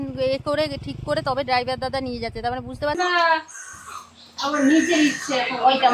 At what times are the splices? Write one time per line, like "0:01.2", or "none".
0:03.0

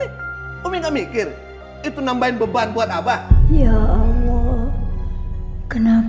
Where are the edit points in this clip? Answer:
none

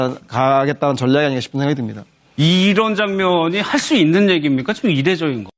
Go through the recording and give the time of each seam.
none

